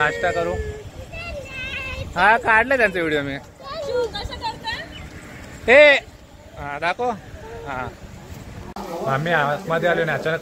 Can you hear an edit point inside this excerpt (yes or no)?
yes